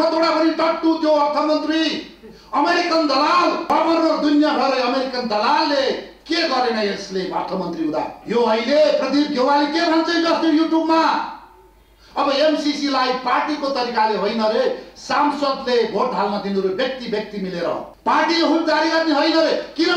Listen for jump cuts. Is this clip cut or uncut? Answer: cut